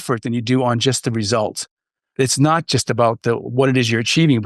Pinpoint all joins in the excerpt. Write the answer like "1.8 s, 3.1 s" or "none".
2.1 s

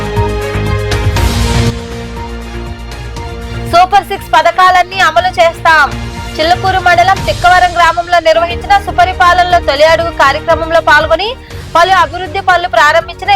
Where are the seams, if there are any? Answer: 1.0 s

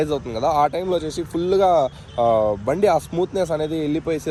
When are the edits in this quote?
none

